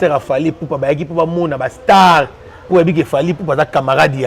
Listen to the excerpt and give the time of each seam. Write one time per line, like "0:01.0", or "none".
none